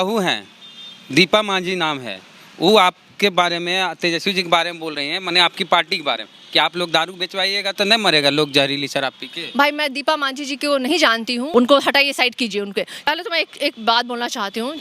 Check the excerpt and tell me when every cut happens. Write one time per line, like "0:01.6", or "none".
0:11.5
0:13.1